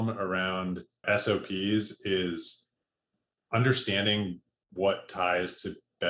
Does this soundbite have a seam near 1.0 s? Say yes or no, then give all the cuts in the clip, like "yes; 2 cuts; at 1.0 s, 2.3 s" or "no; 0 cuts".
yes; 1 cut; at 1.0 s